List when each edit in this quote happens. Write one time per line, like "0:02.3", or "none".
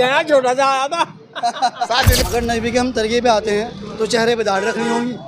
0:02.2